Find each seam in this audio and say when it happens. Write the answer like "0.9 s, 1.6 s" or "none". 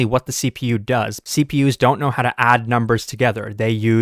1.2 s